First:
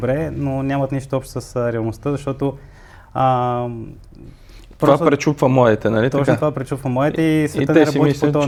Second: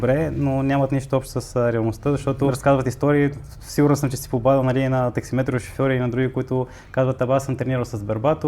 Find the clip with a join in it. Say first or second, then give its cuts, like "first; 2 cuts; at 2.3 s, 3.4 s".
second; 1 cut; at 2.6 s